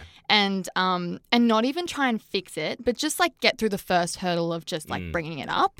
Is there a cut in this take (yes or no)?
no